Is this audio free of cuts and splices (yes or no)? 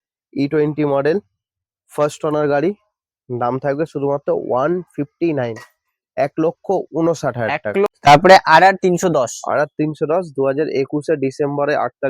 no